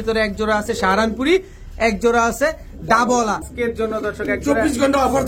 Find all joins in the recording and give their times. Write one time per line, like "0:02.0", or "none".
0:03.5